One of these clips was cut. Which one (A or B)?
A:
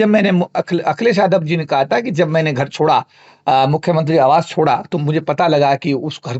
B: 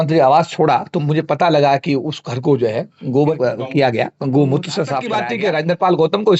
B